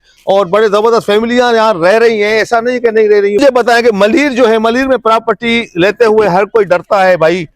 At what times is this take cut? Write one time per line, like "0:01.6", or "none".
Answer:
0:03.4